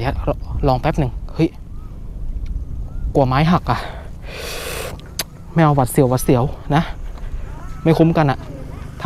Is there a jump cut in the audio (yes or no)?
no